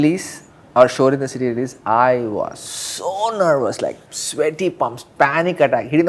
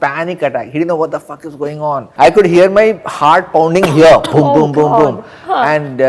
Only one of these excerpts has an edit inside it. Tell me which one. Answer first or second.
second